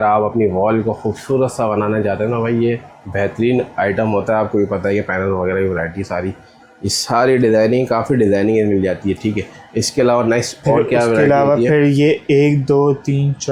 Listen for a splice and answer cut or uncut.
uncut